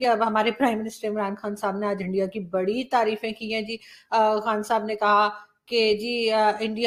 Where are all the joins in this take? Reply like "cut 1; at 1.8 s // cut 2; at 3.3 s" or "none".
none